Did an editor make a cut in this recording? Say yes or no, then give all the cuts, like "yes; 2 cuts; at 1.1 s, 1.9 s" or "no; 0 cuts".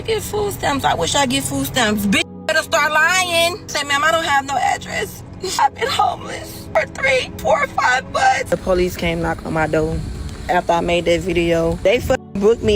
yes; 6 cuts; at 3.7 s, 5.6 s, 6.6 s, 7.3 s, 8.5 s, 11.8 s